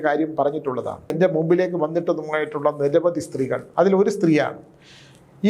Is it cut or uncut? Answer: cut